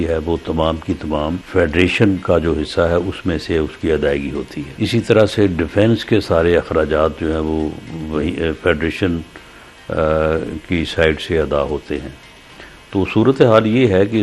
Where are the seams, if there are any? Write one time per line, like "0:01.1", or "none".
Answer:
0:01.4
0:04.6